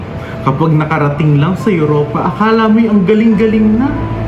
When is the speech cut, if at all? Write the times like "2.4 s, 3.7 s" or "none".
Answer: none